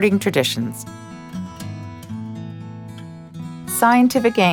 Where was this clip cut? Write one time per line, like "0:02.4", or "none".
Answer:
none